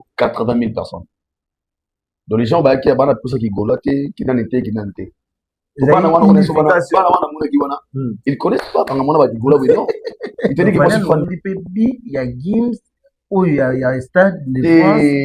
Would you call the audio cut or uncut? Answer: cut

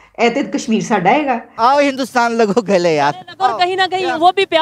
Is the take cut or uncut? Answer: cut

